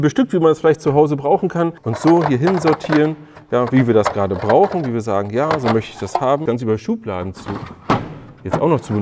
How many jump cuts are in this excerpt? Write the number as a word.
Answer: two